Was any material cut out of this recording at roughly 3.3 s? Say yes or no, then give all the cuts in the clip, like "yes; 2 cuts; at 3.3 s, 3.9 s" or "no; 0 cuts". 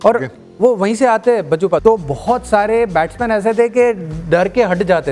no; 1 cut; at 1.8 s